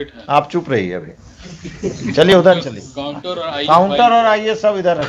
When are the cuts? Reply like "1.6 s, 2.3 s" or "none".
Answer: none